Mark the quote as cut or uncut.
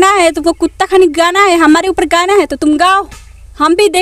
uncut